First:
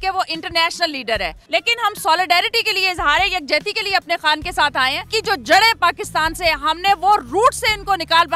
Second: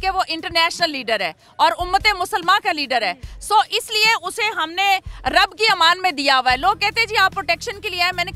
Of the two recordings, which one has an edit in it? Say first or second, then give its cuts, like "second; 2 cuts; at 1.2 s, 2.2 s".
first; 2 cuts; at 1.4 s, 5.0 s